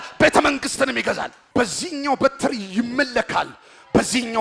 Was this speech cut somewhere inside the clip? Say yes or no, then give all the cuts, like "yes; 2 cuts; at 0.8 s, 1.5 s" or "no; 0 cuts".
yes; 1 cut; at 1.3 s